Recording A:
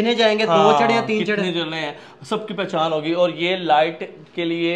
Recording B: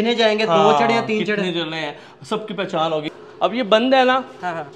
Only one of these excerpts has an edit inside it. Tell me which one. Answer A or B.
B